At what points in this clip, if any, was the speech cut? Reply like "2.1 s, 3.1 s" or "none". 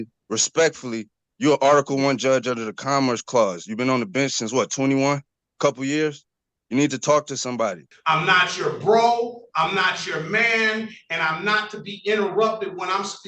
7.9 s